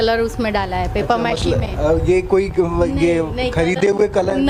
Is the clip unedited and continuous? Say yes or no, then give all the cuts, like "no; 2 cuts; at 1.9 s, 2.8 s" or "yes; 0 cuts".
yes; 0 cuts